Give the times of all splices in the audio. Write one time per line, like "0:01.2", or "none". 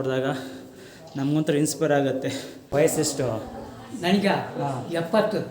0:02.6

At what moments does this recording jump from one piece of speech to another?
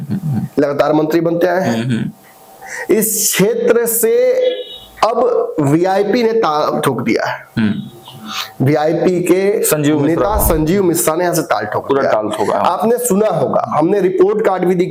none

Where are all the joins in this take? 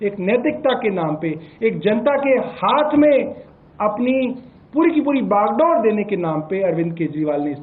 none

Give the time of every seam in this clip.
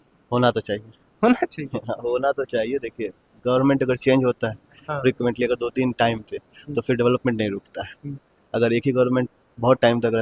none

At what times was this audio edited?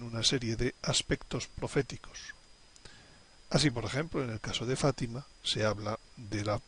0:05.5

